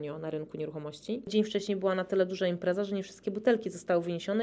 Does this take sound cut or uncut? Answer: cut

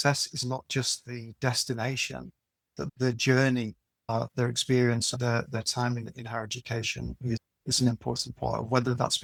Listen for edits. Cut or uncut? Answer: uncut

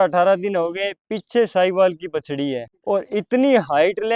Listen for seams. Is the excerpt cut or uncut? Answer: cut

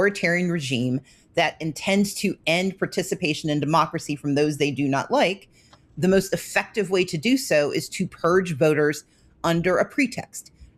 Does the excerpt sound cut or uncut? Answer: uncut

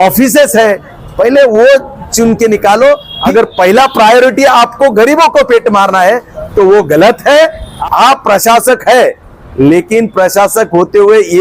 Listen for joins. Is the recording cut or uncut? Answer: cut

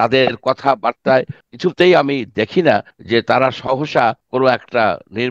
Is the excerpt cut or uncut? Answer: cut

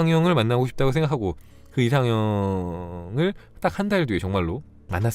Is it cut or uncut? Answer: uncut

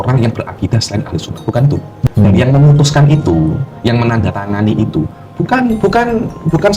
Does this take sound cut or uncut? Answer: cut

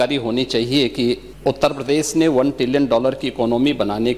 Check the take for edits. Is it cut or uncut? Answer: cut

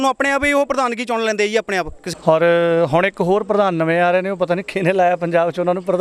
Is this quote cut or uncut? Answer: cut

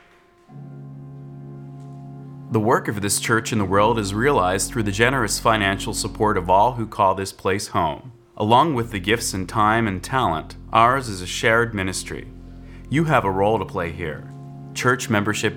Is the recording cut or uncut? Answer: uncut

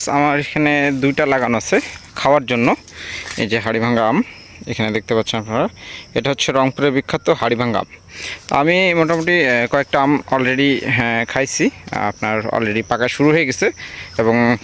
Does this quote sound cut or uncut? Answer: uncut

